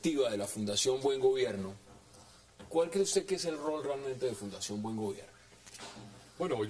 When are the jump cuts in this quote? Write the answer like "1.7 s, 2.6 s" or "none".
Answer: none